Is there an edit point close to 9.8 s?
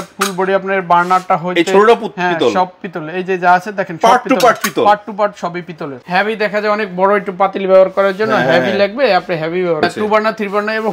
yes; 2 cuts; at 5.9 s, 9.8 s

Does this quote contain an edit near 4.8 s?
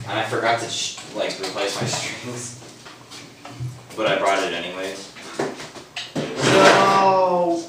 no; 0 cuts

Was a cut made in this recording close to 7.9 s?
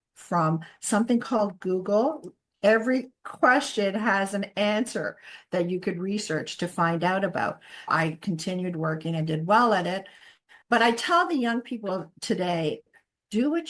yes; 1 cut; at 7.9 s

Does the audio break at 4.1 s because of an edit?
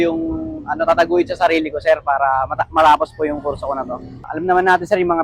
yes; 1 cut; at 4.1 s

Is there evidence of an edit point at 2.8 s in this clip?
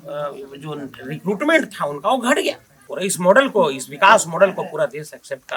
yes; 1 cut; at 2.8 s

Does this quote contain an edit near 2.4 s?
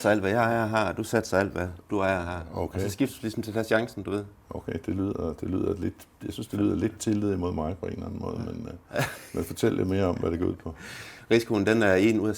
no; 0 cuts

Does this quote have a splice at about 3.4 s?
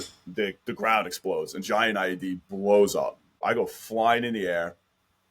yes; 1 cut; at 3.4 s

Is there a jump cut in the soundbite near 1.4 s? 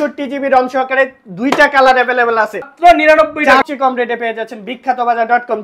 no; 2 cuts; at 2.7 s, 3.6 s

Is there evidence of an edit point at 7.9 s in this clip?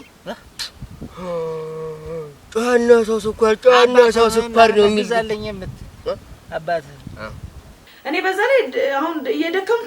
yes; 1 cut; at 7.9 s

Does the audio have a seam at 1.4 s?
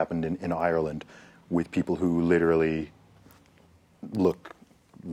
no; 0 cuts

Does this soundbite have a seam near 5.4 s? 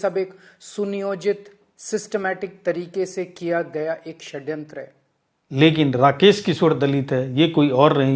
yes; 1 cut; at 5.4 s

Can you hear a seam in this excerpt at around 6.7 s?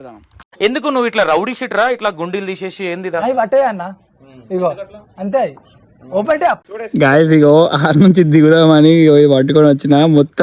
yes; 1 cut; at 6.7 s

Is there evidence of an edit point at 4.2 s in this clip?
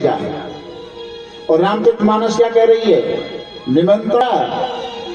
yes; 1 cut; at 4.2 s

